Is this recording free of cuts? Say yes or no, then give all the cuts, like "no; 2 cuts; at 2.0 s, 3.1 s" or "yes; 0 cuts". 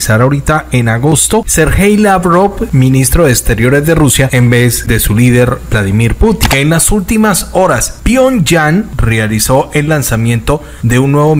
no; 6 cuts; at 1.5 s, 2.6 s, 4.5 s, 6.4 s, 7.9 s, 9.0 s